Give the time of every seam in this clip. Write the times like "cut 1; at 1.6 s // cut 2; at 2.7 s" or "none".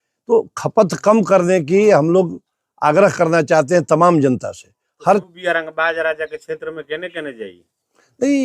cut 1; at 5.2 s